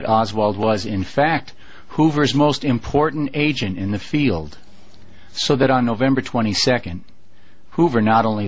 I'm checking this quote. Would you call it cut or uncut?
cut